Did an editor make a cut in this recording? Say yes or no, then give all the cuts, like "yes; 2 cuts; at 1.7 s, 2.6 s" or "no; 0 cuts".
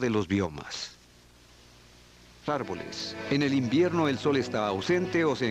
no; 0 cuts